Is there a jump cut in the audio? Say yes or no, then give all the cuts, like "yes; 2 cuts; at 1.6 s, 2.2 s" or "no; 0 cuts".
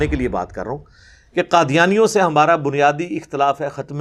no; 0 cuts